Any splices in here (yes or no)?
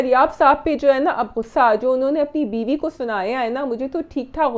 no